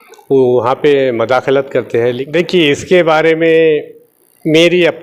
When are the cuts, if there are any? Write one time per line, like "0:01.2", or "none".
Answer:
0:02.2

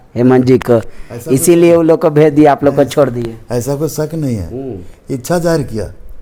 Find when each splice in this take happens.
none

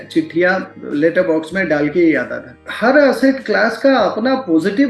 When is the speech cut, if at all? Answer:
0:02.7

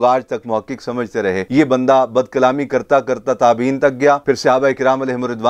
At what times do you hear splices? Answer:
none

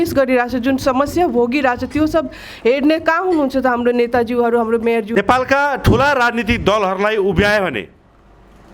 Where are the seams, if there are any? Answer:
0:05.1

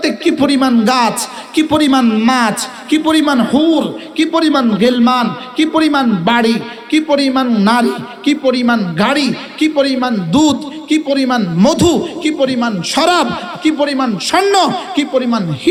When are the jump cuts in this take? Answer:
none

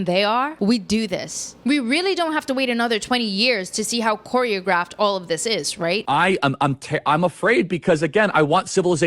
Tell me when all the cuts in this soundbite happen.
0:06.0

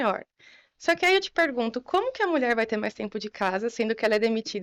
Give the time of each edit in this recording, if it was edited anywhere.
none

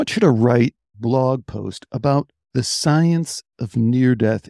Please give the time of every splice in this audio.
0:00.9
0:02.4

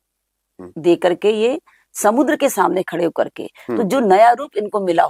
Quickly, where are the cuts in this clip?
none

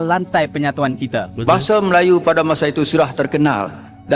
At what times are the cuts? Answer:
0:01.4

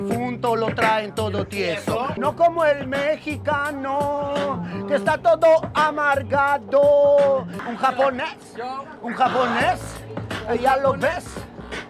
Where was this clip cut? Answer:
0:02.1
0:07.6

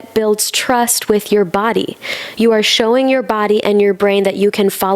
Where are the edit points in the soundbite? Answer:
none

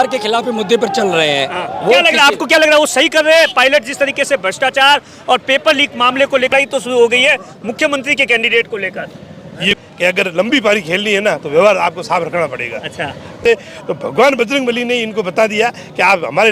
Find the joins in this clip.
0:06.5
0:09.7
0:13.4

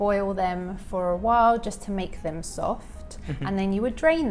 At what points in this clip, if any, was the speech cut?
0:02.9

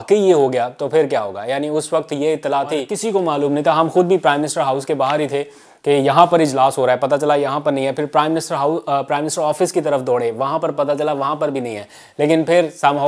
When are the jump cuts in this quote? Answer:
0:02.9

